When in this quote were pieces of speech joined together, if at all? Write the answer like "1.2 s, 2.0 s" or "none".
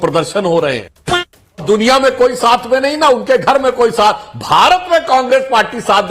1.1 s